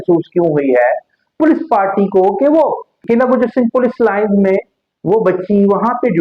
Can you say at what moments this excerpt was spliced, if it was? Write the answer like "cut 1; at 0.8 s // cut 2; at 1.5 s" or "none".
cut 1; at 2.9 s